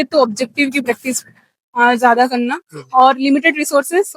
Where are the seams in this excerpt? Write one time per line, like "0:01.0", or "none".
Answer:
none